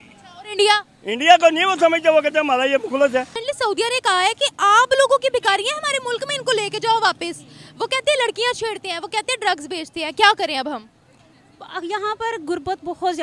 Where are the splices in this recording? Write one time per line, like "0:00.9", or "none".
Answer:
0:03.4